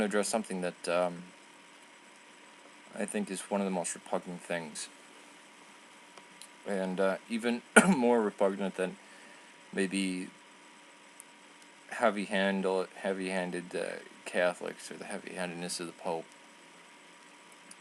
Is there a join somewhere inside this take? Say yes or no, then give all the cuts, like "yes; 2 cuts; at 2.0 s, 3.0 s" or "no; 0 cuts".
no; 0 cuts